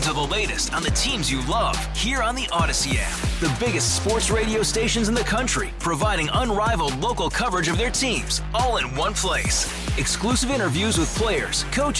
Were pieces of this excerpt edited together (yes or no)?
no